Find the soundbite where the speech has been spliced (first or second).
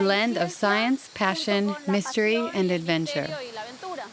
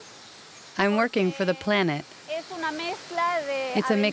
first